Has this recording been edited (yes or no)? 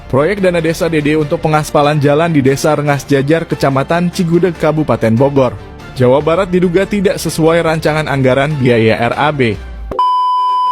yes